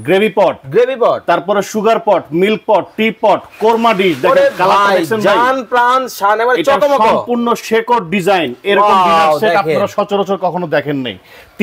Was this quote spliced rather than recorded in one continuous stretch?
no; 0 cuts

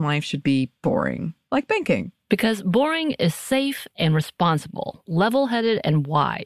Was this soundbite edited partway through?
no; 0 cuts

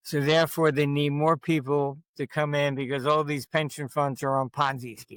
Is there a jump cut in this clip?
no; 0 cuts

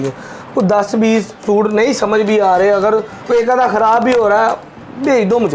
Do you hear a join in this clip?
no; 0 cuts

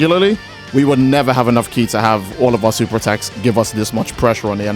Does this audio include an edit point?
no; 0 cuts

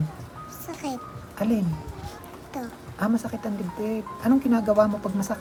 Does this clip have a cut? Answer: no; 0 cuts

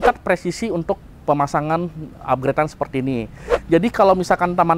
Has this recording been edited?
no; 0 cuts

